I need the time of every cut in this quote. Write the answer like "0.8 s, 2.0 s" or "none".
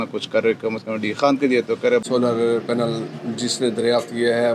2.0 s